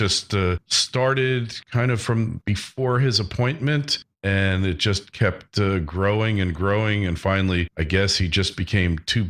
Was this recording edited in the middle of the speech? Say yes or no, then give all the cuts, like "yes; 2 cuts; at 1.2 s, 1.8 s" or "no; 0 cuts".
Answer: no; 0 cuts